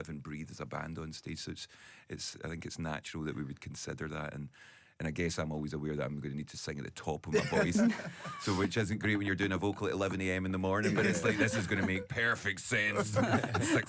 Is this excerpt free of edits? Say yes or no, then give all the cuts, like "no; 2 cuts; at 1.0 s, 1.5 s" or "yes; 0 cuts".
yes; 0 cuts